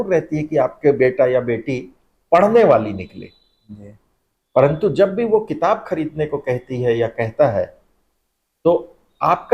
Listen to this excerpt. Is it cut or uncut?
uncut